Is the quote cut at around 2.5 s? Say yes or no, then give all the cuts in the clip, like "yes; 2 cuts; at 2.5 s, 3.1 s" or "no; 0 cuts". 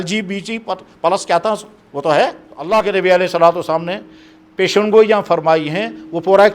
yes; 1 cut; at 2.5 s